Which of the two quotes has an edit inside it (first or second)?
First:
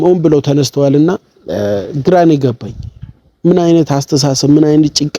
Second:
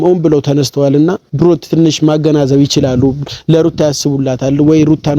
second